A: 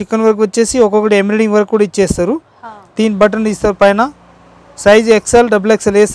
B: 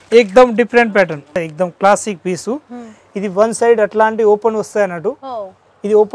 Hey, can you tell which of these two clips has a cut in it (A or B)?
B